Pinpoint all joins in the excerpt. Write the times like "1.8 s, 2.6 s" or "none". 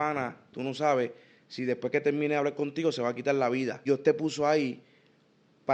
3.8 s